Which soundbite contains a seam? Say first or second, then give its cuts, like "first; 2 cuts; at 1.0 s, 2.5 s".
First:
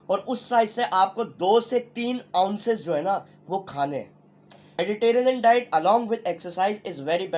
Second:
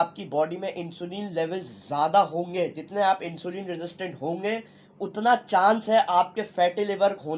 first; 1 cut; at 4.8 s